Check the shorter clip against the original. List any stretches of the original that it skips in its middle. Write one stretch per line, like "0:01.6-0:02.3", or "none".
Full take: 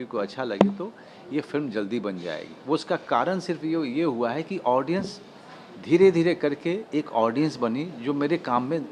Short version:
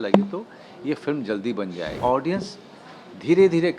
0:02.4-0:04.6